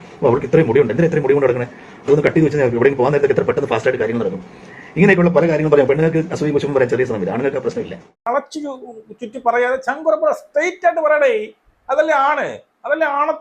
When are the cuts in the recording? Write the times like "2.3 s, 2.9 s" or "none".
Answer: 8.3 s